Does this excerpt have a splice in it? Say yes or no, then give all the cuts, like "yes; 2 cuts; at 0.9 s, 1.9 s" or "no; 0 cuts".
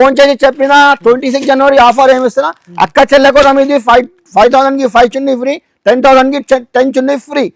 no; 0 cuts